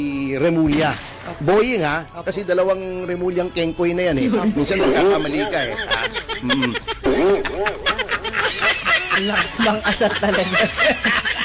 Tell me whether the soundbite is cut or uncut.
cut